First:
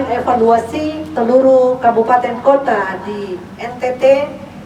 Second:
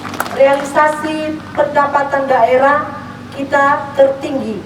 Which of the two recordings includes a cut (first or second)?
first